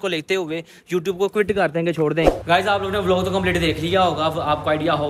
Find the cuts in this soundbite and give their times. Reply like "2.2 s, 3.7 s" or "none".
2.4 s